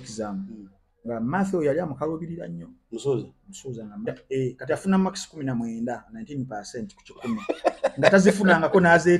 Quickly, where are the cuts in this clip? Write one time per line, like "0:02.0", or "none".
0:04.1